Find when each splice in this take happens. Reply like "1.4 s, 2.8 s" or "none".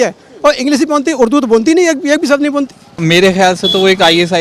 3.0 s